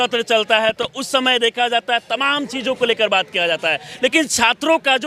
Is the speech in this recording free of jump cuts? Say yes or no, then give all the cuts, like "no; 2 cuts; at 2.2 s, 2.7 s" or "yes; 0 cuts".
yes; 0 cuts